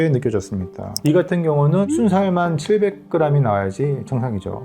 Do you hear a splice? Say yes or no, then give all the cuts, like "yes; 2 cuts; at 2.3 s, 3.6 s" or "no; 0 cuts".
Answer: yes; 1 cut; at 0.9 s